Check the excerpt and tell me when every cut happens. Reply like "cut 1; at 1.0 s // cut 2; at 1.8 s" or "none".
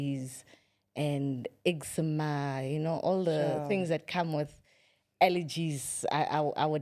none